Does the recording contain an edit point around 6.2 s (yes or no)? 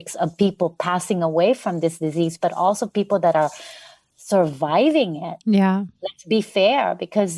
no